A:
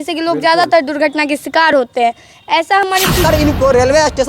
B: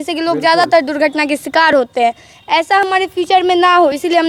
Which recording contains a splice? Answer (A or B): A